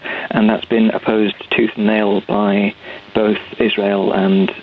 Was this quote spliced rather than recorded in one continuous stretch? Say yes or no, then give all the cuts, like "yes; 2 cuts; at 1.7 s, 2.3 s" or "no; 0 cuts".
no; 0 cuts